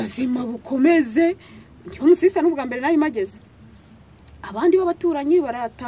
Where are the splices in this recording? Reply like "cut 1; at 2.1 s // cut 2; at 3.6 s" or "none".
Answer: none